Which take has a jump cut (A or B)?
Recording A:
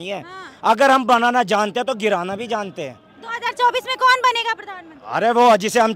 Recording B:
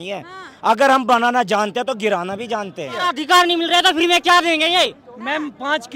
B